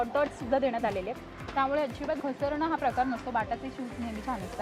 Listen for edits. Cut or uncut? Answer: cut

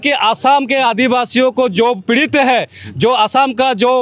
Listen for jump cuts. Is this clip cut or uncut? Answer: uncut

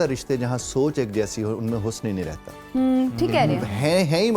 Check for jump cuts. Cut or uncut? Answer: uncut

